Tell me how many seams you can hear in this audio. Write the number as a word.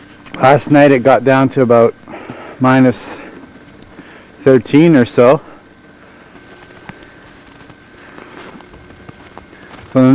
one